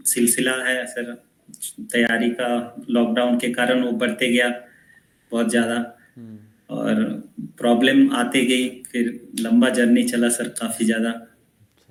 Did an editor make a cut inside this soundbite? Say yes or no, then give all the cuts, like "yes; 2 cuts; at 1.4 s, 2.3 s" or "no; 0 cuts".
no; 0 cuts